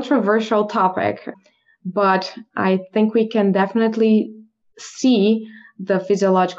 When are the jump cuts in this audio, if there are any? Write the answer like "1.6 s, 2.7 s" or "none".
1.3 s